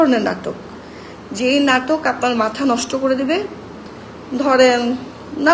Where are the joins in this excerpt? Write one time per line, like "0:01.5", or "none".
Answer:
none